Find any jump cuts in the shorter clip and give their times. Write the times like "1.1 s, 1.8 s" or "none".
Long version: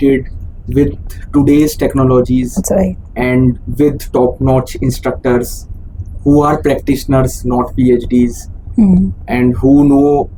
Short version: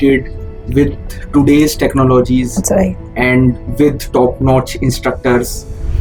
none